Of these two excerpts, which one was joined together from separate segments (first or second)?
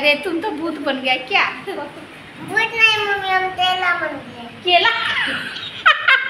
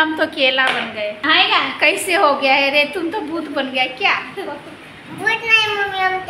second